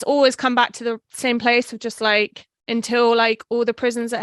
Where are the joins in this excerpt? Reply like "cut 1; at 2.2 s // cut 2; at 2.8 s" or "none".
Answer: none